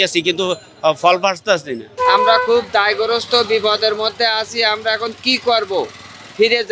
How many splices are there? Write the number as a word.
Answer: one